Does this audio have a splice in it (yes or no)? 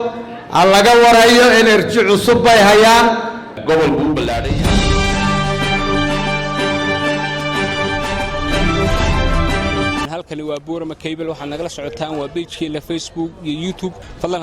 yes